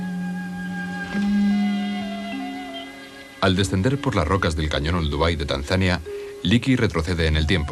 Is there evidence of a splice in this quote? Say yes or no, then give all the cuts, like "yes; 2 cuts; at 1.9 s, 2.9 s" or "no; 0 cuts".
no; 0 cuts